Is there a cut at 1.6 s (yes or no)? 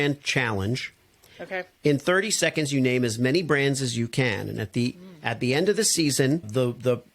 yes